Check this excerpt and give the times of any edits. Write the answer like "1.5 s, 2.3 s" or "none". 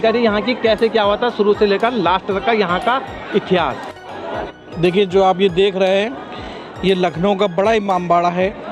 none